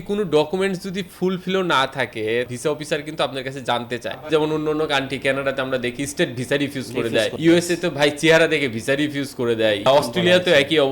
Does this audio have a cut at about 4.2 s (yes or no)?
yes